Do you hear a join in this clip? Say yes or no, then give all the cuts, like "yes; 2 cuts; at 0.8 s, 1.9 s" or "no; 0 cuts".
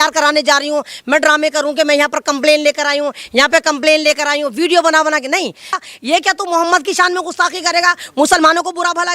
yes; 1 cut; at 5.8 s